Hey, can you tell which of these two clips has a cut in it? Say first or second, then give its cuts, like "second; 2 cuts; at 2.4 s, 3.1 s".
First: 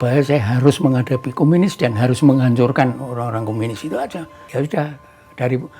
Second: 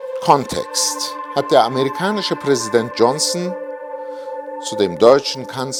first; 1 cut; at 4.4 s